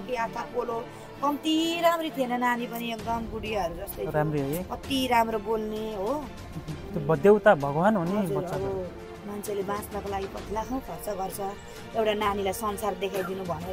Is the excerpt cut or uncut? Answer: uncut